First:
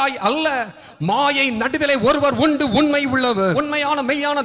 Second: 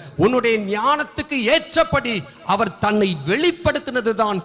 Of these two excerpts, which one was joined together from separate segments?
first; 1 cut; at 3.6 s

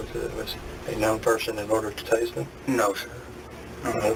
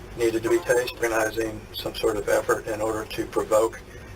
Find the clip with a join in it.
second; 1 cut; at 1.0 s

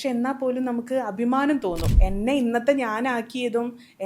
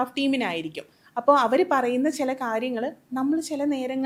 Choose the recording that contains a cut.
first; 1 cut; at 1.9 s

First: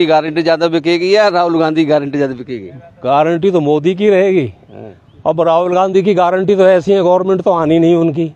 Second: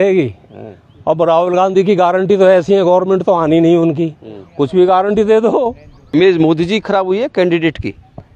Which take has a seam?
second; 1 cut; at 6.0 s

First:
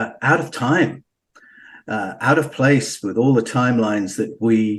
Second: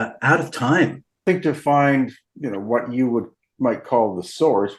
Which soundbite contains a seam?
second; 2 cuts; at 1.2 s, 2.2 s

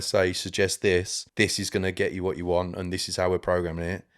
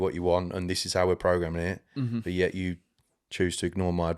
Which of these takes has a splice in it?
first; 1 cut; at 1.2 s

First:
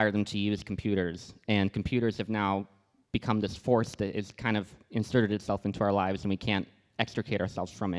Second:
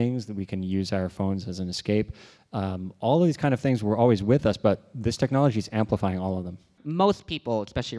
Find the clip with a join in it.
second; 1 cut; at 6.8 s

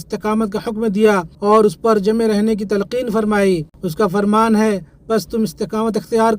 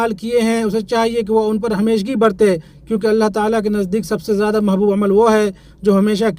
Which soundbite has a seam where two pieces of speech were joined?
first; 2 cuts; at 1.3 s, 3.8 s

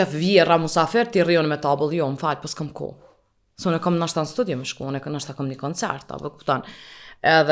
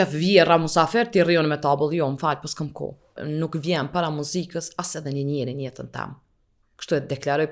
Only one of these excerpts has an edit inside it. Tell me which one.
second; 1 cut; at 3.2 s

